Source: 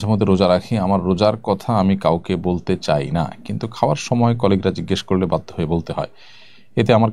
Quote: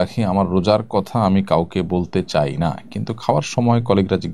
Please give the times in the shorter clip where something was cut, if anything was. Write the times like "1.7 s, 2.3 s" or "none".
none

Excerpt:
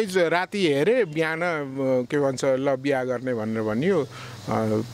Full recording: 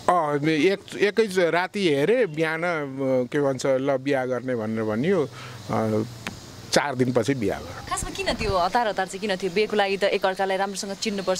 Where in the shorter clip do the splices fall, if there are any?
none

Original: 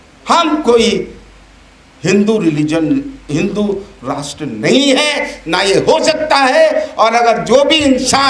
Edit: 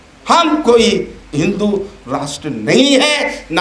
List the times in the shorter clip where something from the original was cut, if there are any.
1.2 s

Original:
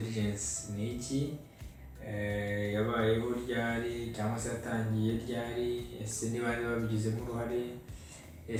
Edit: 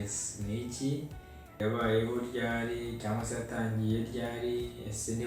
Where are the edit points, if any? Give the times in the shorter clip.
1.6 s

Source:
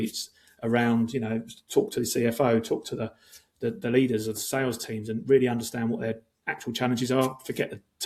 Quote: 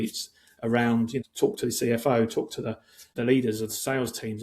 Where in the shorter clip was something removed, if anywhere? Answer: 1.2 s, 3.1 s

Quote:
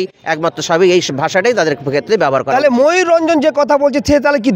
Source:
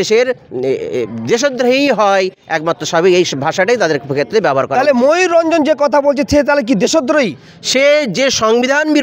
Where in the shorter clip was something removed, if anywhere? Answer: none

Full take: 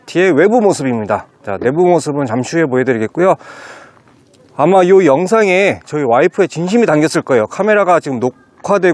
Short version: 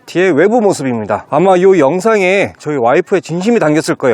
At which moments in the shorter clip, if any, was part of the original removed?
1.2 s

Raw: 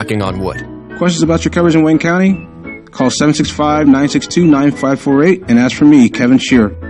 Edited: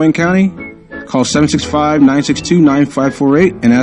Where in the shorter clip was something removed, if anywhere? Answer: none

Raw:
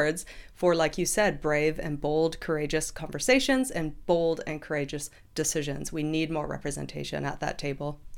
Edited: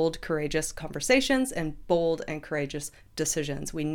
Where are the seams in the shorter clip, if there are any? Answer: none

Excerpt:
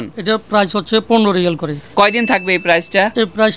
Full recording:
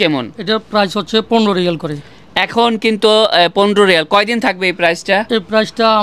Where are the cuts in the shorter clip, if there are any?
1.9 s

